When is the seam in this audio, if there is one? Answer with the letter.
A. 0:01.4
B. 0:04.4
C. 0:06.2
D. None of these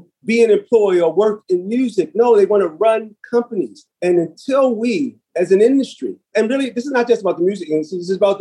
D